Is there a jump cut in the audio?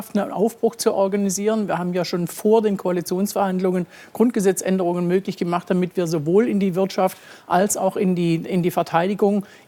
no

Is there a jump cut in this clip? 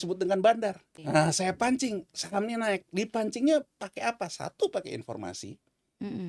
yes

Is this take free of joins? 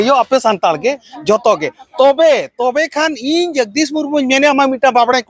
yes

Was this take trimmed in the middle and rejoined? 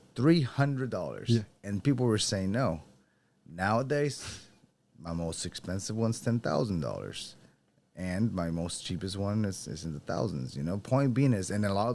no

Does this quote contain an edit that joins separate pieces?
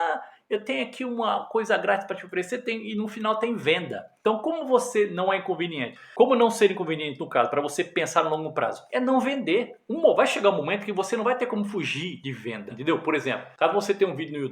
no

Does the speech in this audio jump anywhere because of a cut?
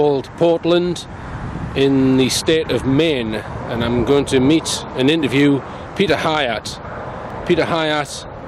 no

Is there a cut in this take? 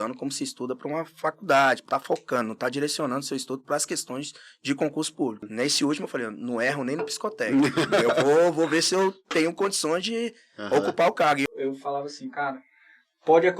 yes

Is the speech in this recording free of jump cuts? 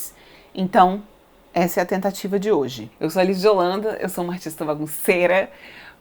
no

